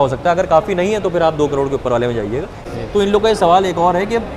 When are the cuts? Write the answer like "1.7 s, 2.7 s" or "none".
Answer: 2.6 s